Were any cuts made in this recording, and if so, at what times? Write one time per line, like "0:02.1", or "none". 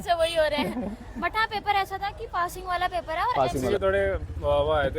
0:03.7